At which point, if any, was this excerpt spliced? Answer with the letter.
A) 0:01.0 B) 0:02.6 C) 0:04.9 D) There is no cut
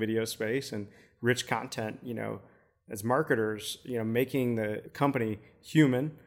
C